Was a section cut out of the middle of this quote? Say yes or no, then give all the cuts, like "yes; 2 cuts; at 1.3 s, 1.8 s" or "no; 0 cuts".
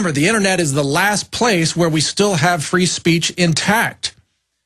yes; 1 cut; at 3.4 s